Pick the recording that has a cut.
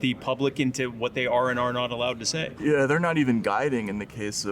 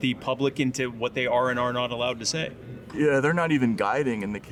first; 1 cut; at 2.4 s

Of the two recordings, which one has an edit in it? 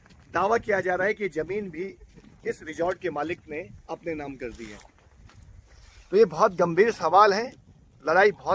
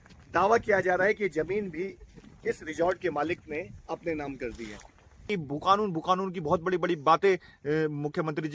second; 1 cut; at 5.2 s

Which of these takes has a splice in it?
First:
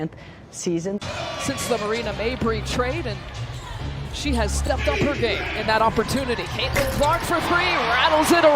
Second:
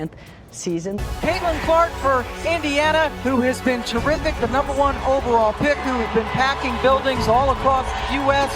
first; 1 cut; at 1.1 s

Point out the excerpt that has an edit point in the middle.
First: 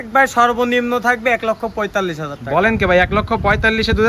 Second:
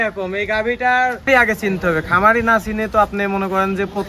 second; 1 cut; at 1.3 s

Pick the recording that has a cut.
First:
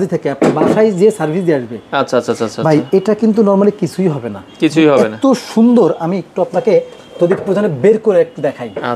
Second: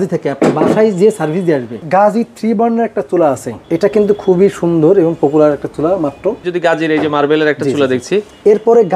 second; 3 cuts; at 1.8 s, 3.5 s, 6.5 s

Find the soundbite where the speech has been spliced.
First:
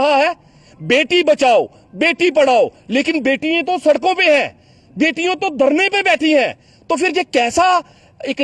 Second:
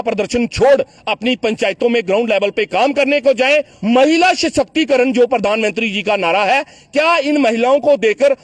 second; 1 cut; at 3.7 s

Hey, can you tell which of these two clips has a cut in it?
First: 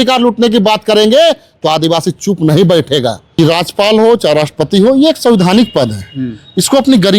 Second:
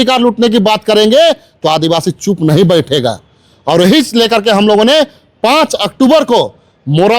first; 1 cut; at 3.2 s

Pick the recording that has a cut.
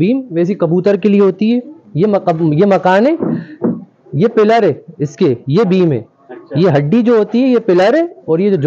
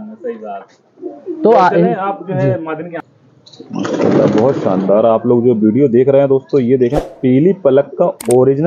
second; 1 cut; at 3.0 s

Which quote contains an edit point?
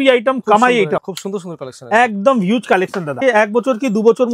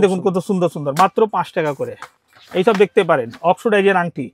first; 2 cuts; at 1.0 s, 3.2 s

